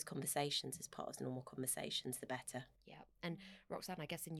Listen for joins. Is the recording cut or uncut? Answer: uncut